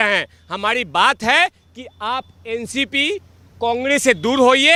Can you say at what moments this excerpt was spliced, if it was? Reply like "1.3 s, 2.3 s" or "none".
none

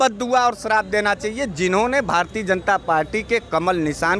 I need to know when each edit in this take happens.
none

